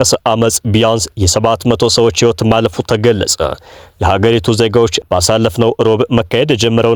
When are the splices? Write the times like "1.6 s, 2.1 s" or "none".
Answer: none

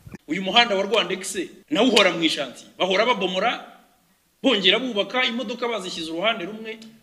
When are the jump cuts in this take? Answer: 1.6 s

